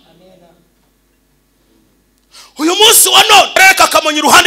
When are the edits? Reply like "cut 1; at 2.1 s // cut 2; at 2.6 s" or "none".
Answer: cut 1; at 3.6 s